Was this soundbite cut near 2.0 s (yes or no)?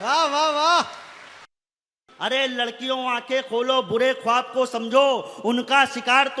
yes